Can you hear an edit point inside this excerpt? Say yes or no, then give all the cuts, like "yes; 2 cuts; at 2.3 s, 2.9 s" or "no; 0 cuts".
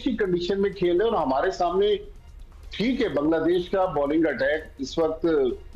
no; 0 cuts